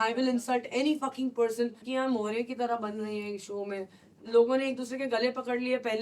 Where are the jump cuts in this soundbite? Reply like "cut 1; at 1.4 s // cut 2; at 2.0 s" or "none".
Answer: cut 1; at 1.8 s // cut 2; at 4.2 s